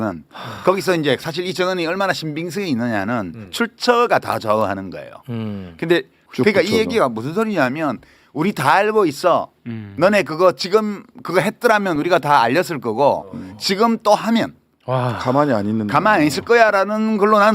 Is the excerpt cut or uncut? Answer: cut